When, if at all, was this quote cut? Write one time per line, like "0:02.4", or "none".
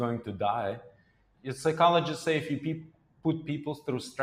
none